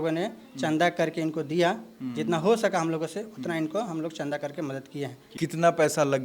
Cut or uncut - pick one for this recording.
cut